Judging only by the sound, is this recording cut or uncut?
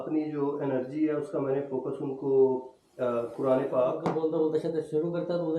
cut